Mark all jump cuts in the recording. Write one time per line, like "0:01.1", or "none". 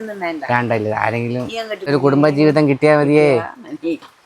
0:01.9